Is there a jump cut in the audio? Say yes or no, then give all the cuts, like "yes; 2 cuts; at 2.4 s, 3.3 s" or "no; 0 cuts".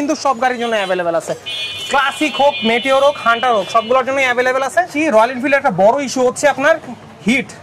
yes; 1 cut; at 4.9 s